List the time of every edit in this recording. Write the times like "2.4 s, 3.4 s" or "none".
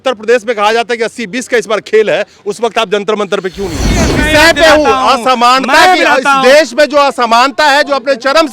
4.2 s